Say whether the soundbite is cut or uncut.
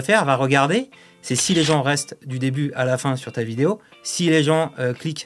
uncut